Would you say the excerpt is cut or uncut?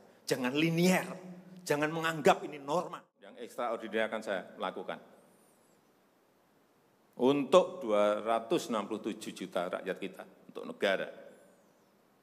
cut